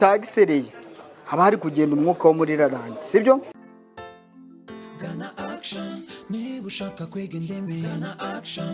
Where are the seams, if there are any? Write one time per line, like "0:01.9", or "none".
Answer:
0:03.6